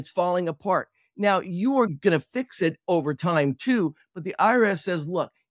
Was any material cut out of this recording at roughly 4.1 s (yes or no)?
no